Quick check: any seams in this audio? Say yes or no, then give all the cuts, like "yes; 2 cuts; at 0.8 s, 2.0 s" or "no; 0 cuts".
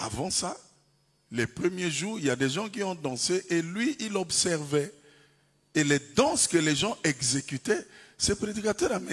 no; 0 cuts